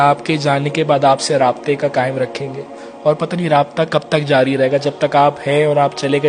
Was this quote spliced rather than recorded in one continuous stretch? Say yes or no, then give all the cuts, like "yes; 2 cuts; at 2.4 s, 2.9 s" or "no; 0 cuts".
no; 0 cuts